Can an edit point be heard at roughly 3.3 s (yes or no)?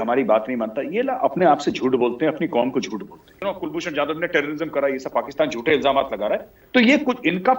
yes